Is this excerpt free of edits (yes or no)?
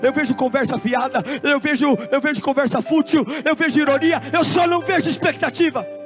yes